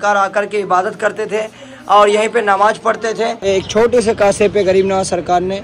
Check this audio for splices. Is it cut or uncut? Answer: cut